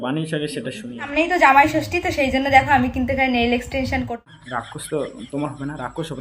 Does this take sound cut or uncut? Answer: cut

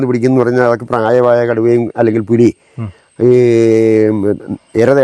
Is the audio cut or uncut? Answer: uncut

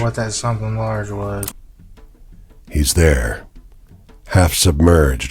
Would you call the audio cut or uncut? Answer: cut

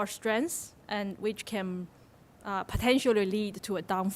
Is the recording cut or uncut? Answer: uncut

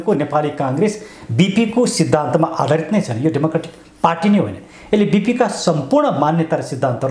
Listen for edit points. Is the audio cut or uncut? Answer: uncut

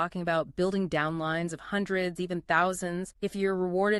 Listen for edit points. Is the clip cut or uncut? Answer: cut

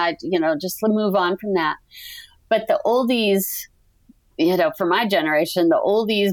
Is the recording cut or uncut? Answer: uncut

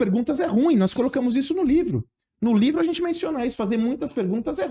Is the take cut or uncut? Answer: uncut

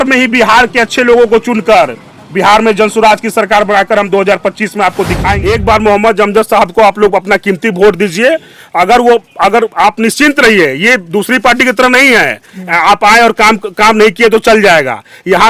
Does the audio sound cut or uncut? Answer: cut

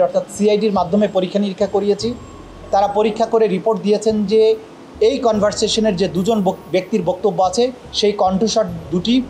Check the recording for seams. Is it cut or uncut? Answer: uncut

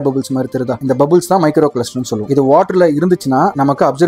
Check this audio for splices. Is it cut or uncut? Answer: uncut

